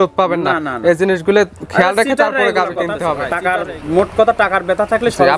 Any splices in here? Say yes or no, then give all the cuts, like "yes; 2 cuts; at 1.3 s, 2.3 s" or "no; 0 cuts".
yes; 1 cut; at 3.3 s